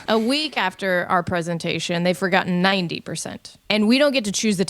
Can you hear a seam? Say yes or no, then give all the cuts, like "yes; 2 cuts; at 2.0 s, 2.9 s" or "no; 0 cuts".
yes; 1 cut; at 3.6 s